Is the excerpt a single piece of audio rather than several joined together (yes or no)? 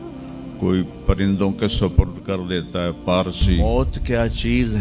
no